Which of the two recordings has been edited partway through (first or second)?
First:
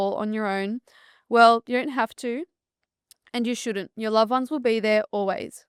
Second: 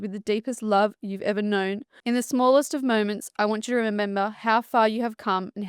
second